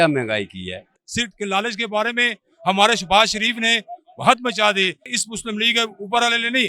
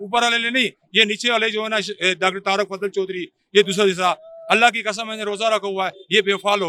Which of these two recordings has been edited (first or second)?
first